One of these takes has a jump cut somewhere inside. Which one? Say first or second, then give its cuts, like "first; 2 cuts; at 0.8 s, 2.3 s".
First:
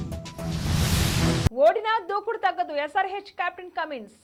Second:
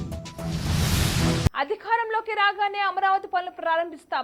second; 1 cut; at 1.1 s